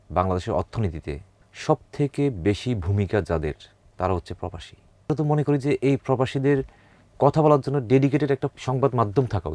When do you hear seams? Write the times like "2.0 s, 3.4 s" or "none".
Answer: 5.1 s

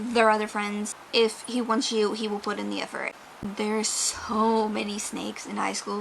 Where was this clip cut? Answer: 1.0 s, 3.1 s

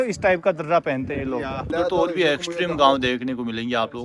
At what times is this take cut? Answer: 1.7 s

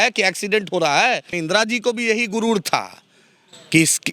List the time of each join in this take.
1.3 s

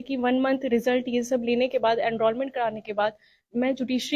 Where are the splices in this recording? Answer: none

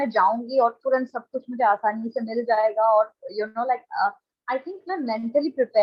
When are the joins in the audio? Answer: none

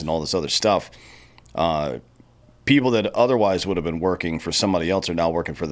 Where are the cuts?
none

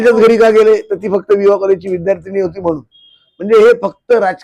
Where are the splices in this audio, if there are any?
none

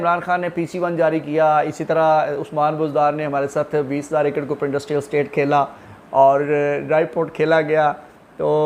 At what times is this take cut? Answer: none

